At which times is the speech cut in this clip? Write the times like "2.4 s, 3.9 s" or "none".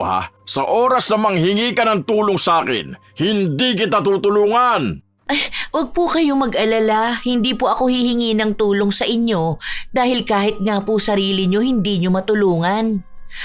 5.1 s